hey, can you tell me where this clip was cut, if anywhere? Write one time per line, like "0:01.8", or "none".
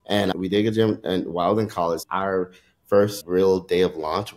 0:02.0